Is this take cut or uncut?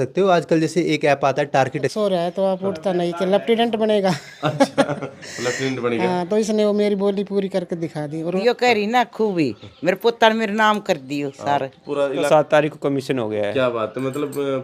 cut